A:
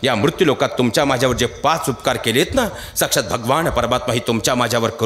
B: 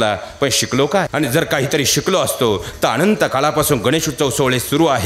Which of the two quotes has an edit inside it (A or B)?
B